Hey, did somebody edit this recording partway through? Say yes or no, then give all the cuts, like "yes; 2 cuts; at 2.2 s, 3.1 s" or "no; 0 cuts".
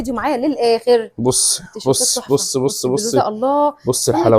no; 0 cuts